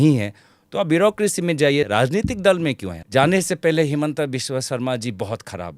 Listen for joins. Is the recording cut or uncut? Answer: cut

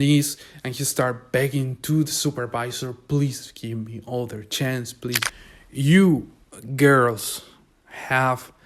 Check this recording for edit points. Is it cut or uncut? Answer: cut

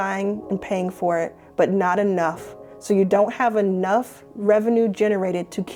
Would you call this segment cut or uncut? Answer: uncut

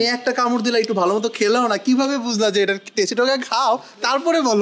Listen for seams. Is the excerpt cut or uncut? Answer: uncut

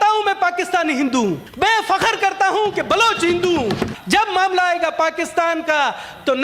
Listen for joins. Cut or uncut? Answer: cut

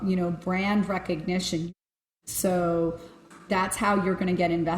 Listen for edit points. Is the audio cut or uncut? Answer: cut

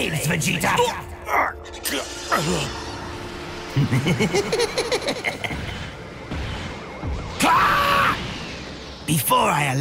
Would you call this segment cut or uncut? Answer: uncut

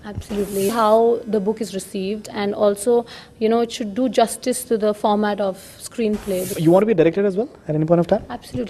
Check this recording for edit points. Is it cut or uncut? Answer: cut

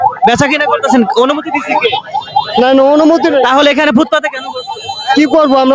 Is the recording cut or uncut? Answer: uncut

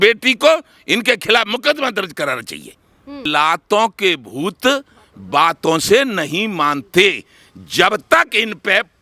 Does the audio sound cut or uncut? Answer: cut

